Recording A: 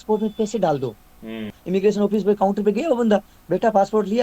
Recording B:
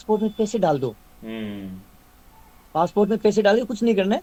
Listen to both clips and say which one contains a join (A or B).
A